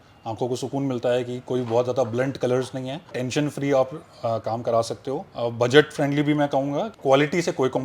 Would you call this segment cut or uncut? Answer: cut